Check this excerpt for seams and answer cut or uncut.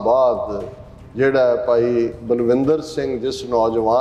uncut